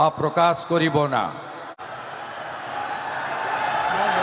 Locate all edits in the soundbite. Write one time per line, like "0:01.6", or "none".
0:01.8